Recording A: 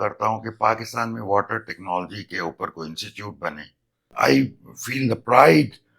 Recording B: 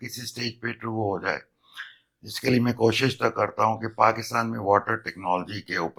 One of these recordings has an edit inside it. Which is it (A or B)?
A